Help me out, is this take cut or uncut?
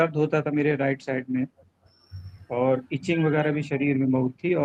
uncut